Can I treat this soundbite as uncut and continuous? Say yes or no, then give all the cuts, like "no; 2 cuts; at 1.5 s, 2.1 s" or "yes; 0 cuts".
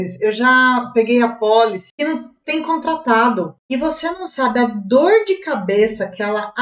no; 2 cuts; at 1.8 s, 3.6 s